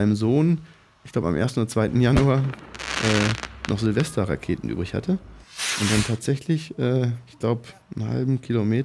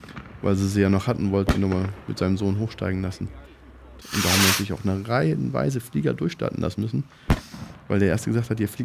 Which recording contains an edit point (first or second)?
second